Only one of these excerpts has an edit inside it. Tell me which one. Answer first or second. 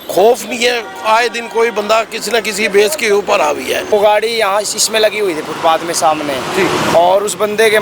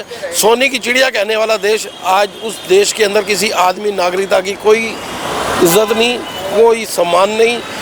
first